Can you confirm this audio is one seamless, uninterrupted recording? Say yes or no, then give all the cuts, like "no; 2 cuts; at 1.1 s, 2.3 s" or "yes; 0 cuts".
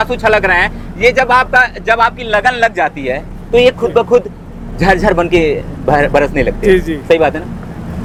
yes; 0 cuts